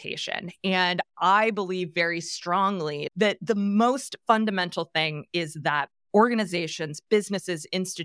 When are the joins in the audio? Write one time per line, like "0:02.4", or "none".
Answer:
0:03.1